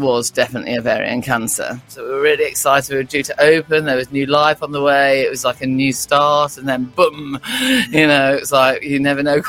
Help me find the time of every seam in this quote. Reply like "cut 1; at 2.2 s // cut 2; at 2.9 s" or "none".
cut 1; at 1.9 s